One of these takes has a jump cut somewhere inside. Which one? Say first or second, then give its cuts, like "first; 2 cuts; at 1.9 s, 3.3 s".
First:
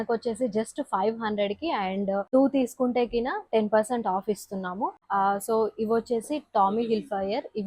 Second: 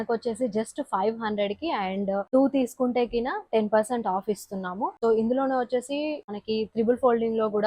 first; 1 cut; at 5.0 s